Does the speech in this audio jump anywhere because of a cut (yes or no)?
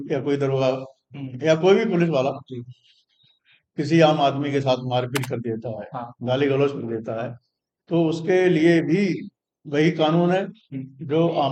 no